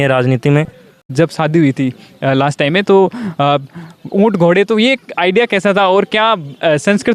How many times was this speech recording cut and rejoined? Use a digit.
1